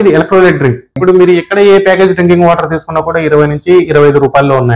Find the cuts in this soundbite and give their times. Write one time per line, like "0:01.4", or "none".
0:00.9

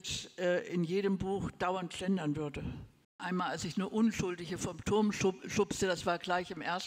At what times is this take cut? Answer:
0:03.2

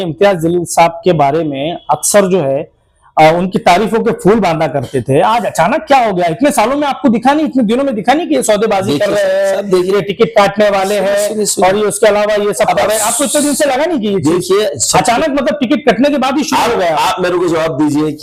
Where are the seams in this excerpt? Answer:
none

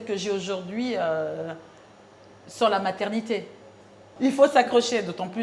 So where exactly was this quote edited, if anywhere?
0:04.1

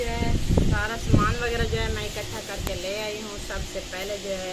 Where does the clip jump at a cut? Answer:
none

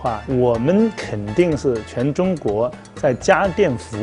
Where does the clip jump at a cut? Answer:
none

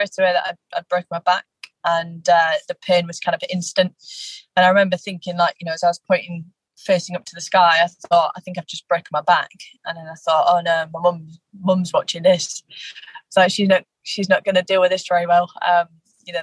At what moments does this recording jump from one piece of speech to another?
0:01.6

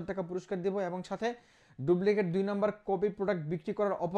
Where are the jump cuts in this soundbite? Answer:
none

